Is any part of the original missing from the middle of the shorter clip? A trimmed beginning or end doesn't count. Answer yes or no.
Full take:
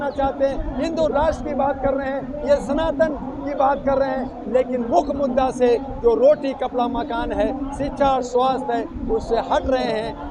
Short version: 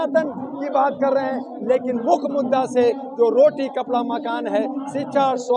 no